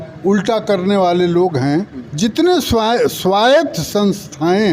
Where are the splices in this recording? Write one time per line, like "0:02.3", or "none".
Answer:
0:02.0